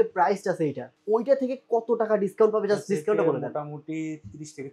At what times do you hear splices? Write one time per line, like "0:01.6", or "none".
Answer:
none